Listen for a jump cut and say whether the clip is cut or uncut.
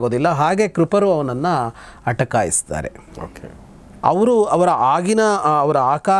uncut